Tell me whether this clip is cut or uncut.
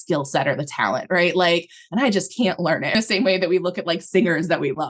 cut